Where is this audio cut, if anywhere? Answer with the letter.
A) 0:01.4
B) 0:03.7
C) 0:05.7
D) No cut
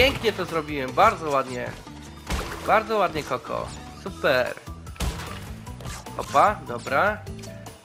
D